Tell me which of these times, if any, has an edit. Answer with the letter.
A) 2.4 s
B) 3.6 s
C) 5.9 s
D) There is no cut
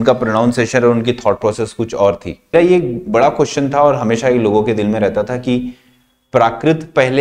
A